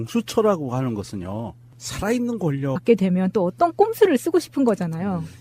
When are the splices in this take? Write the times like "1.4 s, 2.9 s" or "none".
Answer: none